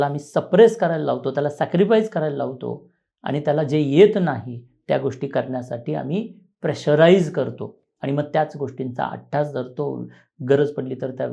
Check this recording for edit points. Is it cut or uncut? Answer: uncut